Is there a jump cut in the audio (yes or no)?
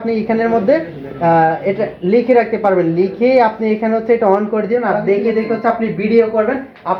no